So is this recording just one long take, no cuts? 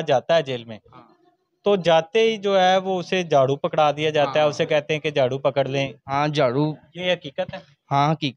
yes; 0 cuts

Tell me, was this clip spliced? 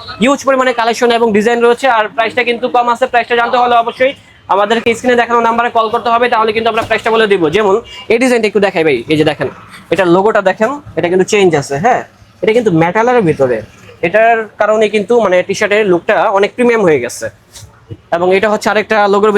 no; 0 cuts

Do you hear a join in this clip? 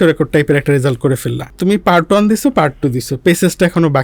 yes; 1 cut; at 1.5 s

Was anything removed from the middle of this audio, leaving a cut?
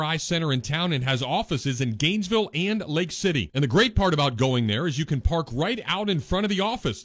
no; 0 cuts

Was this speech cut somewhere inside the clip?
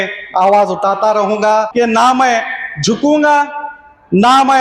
yes; 1 cut; at 1.7 s

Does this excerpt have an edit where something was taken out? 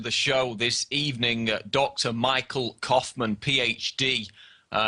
yes; 1 cut; at 2.4 s

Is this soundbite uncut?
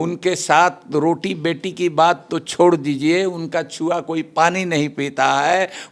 yes; 0 cuts

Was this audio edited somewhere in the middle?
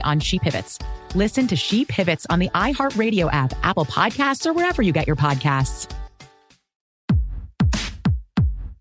yes; 1 cut; at 7.1 s

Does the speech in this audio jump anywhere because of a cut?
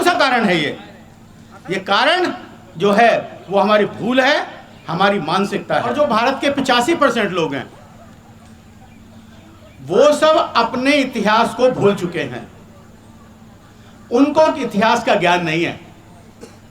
yes; 1 cut; at 5.9 s

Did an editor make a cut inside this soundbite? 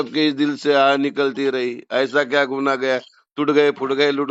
no; 0 cuts

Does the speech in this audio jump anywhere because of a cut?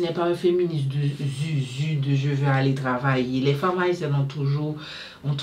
no; 0 cuts

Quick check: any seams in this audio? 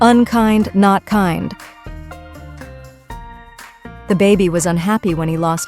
yes; 2 cuts; at 1.6 s, 4.0 s

